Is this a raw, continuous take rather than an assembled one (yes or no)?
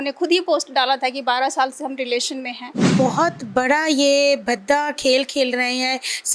no